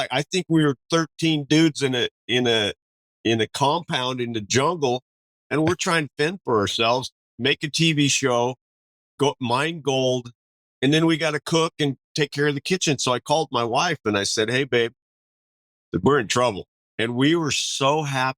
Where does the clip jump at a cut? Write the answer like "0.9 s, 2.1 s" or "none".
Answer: 16.7 s